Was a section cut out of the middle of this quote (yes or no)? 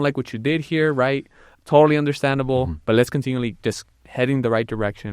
yes